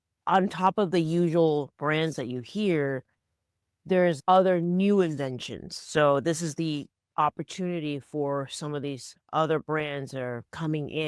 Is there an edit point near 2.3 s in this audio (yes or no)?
no